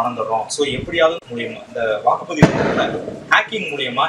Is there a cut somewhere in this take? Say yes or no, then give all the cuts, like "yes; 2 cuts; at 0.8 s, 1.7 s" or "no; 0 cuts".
no; 0 cuts